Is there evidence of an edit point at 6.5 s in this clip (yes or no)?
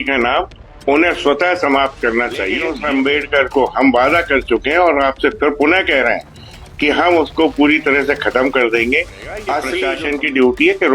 no